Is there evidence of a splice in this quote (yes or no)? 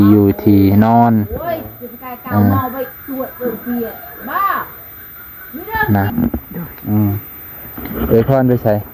yes